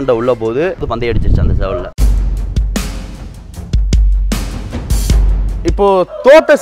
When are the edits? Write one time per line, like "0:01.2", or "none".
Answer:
0:00.9
0:02.0
0:05.6